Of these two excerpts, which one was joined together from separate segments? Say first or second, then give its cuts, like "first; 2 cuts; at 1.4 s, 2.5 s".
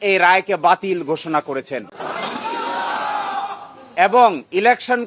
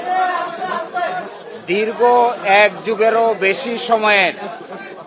first; 1 cut; at 2.0 s